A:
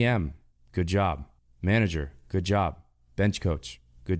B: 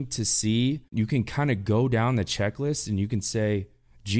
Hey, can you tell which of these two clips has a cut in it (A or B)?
B